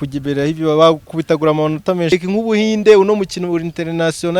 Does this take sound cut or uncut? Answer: cut